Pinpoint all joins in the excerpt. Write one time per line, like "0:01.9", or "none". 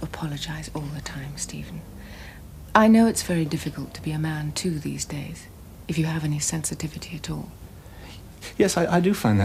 none